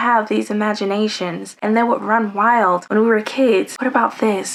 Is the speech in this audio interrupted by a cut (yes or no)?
no